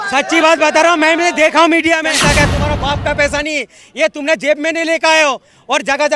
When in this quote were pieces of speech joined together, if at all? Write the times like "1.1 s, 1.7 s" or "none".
2.2 s